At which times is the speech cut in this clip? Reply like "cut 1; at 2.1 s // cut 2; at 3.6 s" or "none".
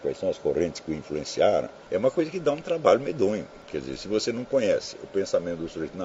cut 1; at 1.8 s // cut 2; at 3.6 s